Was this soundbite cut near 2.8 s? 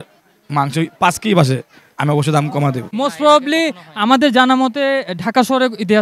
yes; 1 cut; at 2.8 s

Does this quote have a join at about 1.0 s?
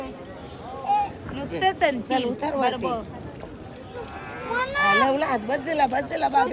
no; 0 cuts

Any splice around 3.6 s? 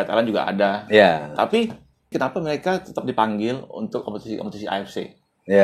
no; 0 cuts

